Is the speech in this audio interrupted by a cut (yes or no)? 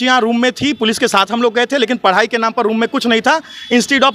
no